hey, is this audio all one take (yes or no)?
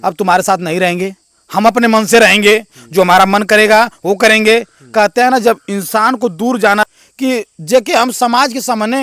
no